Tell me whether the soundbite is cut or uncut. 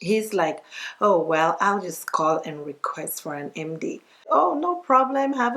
cut